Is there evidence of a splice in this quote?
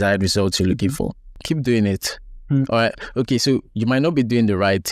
yes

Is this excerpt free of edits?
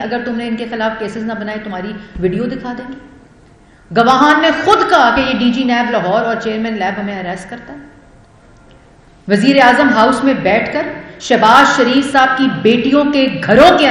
yes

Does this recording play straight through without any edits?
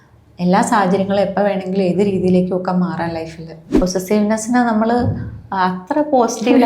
no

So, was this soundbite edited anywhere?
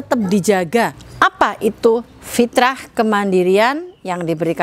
yes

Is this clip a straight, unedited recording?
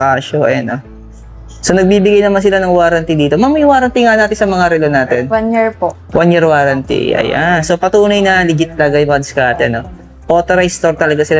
yes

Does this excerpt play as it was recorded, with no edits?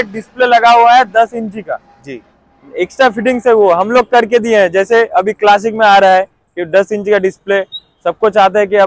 yes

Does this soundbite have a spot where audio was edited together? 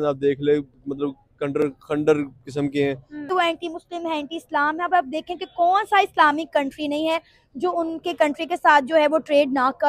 yes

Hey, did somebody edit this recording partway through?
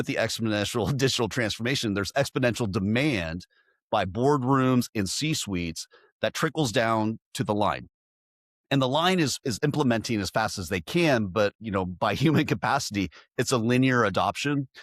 no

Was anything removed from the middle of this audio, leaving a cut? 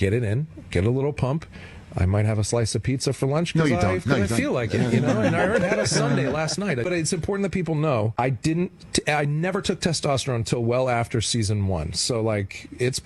yes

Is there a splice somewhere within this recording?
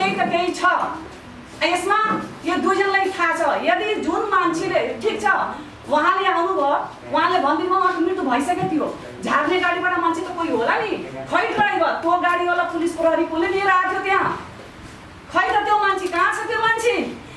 no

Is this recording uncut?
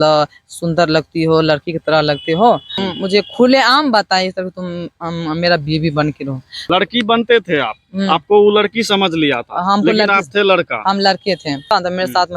no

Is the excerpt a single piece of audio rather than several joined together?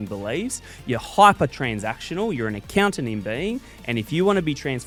yes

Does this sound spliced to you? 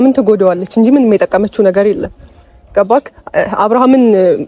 no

